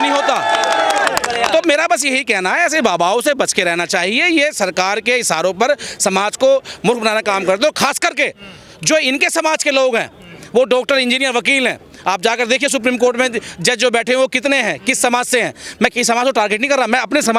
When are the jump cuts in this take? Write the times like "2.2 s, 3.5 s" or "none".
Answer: none